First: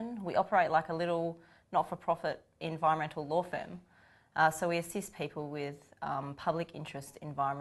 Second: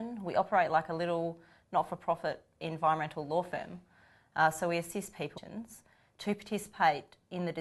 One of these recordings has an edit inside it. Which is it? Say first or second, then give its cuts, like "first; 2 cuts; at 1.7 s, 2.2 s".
first; 1 cut; at 5.3 s